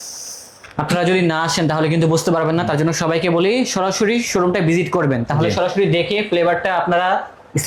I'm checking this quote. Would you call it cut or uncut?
uncut